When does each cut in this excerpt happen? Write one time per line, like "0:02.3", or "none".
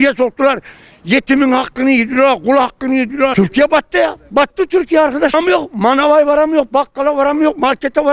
0:03.3
0:05.3